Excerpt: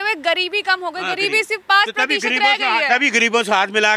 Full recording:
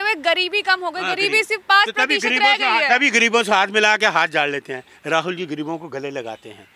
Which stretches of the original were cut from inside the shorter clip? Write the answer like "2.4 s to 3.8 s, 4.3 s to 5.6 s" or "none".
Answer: none

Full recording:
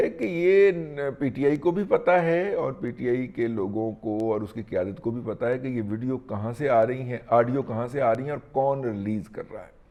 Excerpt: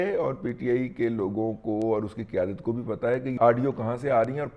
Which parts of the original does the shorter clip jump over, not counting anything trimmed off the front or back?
5.7 s to 7.2 s

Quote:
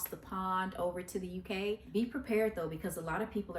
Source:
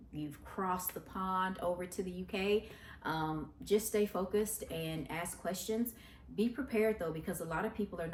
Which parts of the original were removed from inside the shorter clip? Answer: 2.7 s to 6.3 s

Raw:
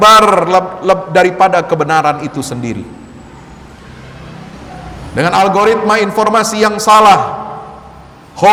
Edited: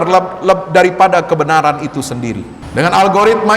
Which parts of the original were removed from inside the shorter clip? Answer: 3.0 s to 5.0 s

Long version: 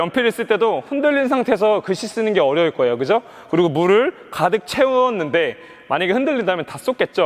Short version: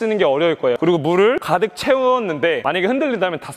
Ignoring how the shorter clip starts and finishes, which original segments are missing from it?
2.9 s to 3.5 s, 4.1 s to 4.3 s, 5.5 s to 5.9 s

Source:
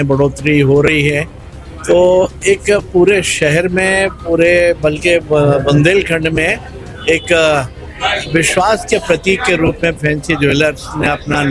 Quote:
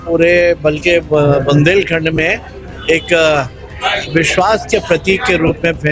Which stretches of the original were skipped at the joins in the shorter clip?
none

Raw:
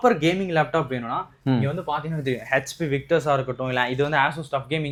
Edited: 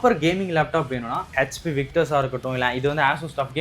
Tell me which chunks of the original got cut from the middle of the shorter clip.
1.3 s to 2.4 s

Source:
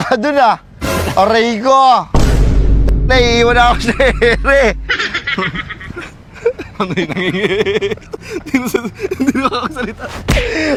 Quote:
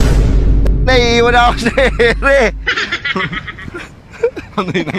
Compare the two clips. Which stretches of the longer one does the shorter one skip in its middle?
none

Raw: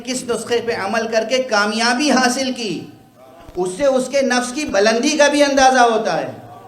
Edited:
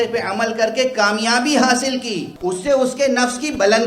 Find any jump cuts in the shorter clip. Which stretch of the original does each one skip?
2.8 s to 3.4 s

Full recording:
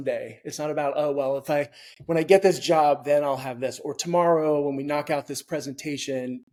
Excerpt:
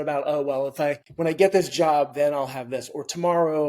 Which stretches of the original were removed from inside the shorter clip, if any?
1.8 s to 2.0 s

